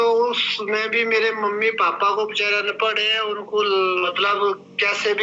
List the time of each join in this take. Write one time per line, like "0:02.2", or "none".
0:04.1